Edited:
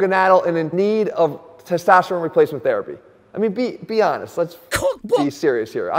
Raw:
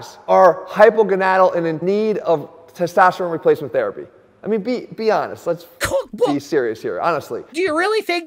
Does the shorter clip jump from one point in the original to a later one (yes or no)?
no